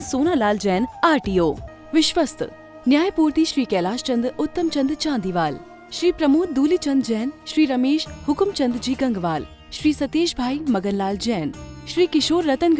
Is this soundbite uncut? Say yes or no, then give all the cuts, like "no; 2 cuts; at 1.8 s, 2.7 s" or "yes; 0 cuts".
no; 1 cut; at 1.7 s